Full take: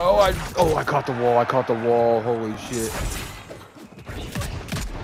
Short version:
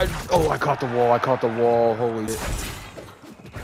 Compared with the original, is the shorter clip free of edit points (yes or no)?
no